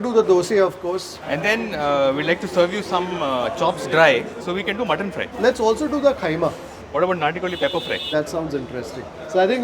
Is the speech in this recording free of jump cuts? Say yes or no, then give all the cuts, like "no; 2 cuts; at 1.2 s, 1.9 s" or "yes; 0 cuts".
no; 3 cuts; at 1.2 s, 5.2 s, 8.1 s